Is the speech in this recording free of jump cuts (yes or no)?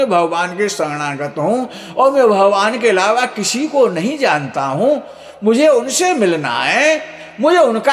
yes